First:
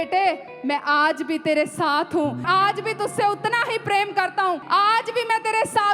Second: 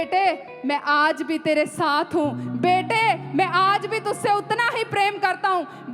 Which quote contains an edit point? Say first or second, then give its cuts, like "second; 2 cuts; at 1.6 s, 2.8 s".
first; 2 cuts; at 2.4 s, 4.6 s